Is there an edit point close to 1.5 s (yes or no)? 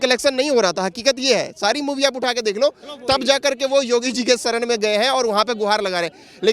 no